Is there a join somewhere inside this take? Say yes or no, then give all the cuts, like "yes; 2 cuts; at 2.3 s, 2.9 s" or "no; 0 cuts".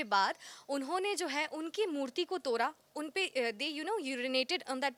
no; 0 cuts